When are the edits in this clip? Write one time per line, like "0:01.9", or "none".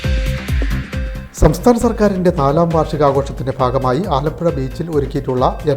0:00.9